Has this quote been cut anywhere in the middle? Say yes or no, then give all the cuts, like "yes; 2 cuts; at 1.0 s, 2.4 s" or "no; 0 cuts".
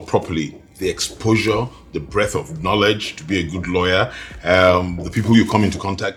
no; 0 cuts